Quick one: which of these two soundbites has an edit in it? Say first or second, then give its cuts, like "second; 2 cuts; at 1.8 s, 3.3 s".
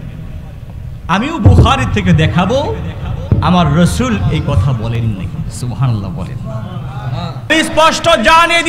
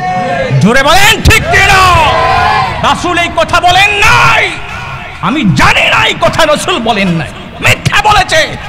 first; 1 cut; at 7.5 s